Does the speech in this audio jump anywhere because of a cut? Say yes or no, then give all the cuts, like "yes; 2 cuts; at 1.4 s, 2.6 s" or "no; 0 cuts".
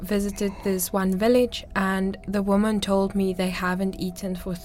no; 0 cuts